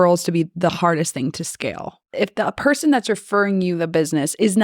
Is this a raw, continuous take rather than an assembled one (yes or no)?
no